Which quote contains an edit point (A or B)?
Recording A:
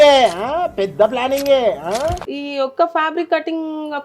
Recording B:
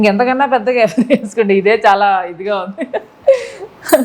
A